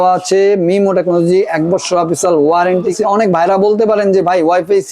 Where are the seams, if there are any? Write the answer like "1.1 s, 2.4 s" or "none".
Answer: 2.9 s